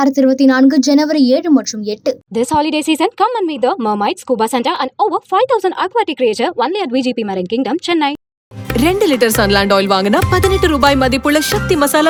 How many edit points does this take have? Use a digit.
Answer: 0